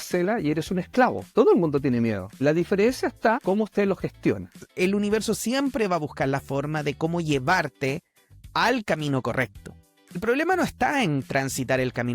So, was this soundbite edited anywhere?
yes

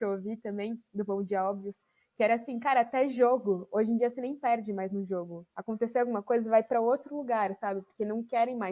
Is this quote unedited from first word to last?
yes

